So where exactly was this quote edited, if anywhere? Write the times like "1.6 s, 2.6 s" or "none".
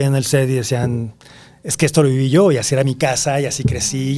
none